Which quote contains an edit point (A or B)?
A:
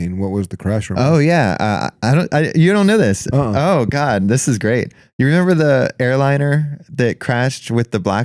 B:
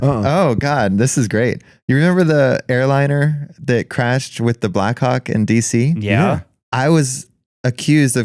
B